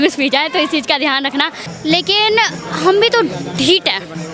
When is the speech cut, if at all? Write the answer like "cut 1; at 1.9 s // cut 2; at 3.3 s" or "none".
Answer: cut 1; at 1.6 s